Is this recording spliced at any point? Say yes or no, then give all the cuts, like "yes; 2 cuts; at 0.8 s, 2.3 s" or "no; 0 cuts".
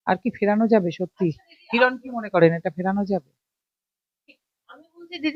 no; 0 cuts